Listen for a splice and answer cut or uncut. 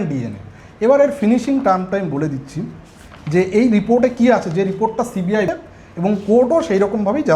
cut